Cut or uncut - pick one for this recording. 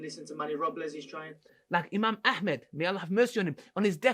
cut